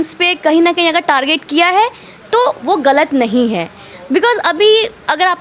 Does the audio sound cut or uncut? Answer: uncut